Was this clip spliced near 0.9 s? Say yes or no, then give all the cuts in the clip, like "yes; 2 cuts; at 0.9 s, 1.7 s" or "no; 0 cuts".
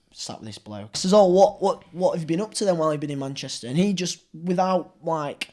yes; 1 cut; at 0.9 s